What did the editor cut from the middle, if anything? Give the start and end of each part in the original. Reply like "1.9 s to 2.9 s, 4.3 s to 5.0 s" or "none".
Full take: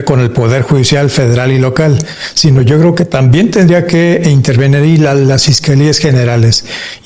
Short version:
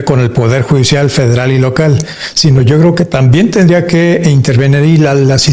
none